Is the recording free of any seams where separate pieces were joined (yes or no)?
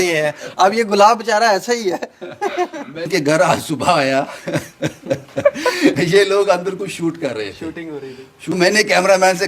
no